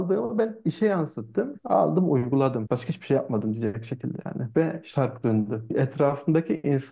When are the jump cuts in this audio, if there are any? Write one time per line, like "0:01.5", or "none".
0:01.5
0:02.6
0:05.6